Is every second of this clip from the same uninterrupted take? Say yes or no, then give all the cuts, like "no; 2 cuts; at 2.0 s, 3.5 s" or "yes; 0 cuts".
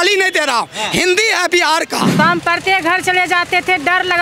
no; 1 cut; at 2.1 s